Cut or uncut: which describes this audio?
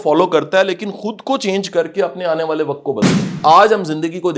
cut